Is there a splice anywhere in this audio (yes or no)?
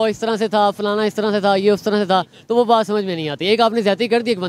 no